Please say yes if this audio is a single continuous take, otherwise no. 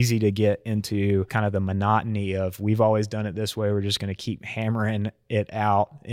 no